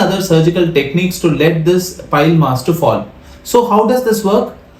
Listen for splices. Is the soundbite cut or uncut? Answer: uncut